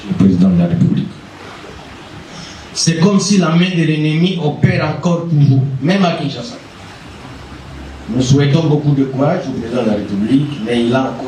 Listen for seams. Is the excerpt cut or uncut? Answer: uncut